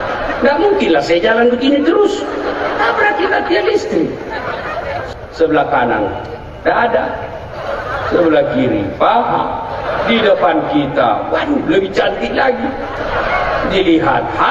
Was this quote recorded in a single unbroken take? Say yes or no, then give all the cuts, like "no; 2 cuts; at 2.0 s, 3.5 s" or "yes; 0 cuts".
no; 1 cut; at 5.0 s